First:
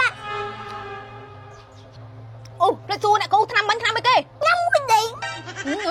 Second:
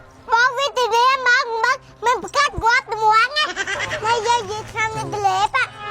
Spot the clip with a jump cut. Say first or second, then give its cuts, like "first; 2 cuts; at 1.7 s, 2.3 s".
second; 1 cut; at 3.8 s